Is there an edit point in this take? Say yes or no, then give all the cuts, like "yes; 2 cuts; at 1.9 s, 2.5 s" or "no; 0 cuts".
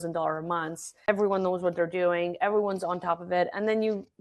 yes; 1 cut; at 1.1 s